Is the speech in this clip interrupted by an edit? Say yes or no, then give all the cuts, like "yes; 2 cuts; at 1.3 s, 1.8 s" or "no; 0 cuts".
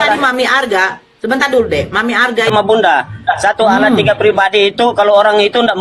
yes; 1 cut; at 2.5 s